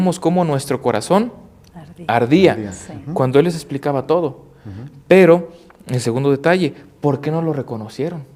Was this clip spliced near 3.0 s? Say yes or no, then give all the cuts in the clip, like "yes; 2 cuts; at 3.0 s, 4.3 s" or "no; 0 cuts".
no; 0 cuts